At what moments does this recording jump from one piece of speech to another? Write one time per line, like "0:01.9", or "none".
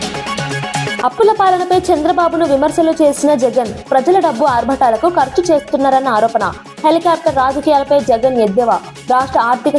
none